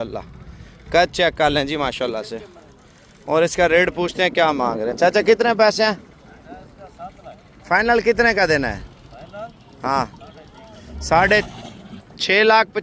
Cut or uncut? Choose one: uncut